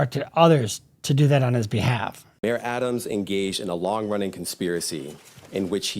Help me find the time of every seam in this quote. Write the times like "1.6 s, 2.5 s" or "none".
2.2 s